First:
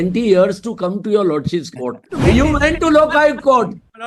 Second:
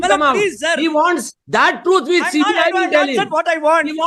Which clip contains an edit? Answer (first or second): first